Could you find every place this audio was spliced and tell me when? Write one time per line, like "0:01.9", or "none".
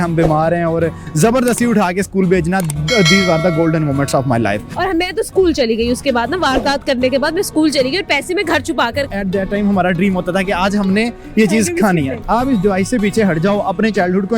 0:04.7
0:09.1
0:12.1

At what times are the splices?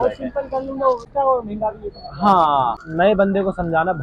0:01.1
0:02.8

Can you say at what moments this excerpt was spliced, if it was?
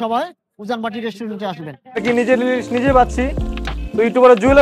0:02.0

